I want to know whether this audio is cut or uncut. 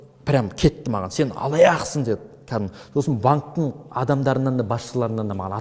uncut